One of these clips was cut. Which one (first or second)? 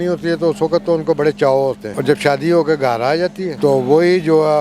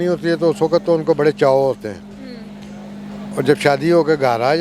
first